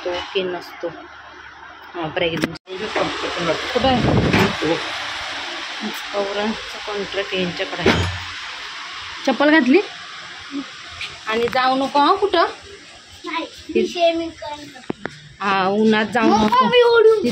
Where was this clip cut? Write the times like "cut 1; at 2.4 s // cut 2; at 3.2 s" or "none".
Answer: cut 1; at 2.6 s